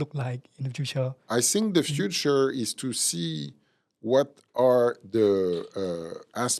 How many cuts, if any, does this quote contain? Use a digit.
1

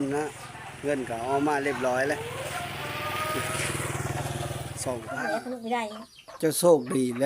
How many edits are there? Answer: 1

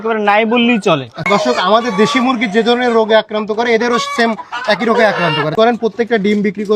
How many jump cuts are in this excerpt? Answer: 2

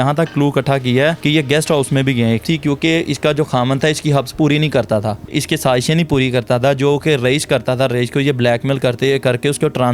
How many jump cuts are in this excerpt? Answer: 3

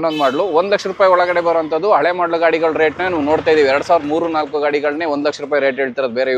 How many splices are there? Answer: 0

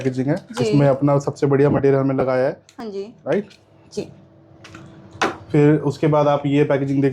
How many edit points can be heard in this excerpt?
0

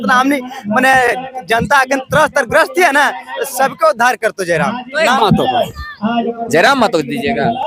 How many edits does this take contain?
1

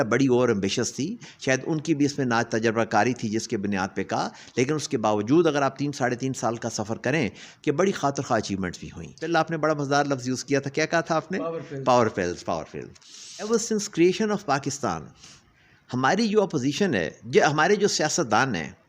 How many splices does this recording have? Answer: 3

